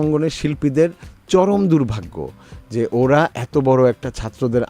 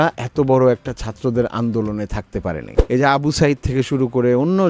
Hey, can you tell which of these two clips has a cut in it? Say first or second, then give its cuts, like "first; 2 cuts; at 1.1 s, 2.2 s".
second; 1 cut; at 2.7 s